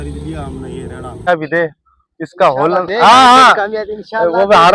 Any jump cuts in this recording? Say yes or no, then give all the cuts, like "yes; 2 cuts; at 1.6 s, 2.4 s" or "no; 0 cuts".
yes; 1 cut; at 1.3 s